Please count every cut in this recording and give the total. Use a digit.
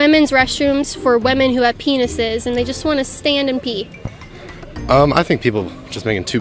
0